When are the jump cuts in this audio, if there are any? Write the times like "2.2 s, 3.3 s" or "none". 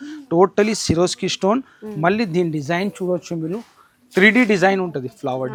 none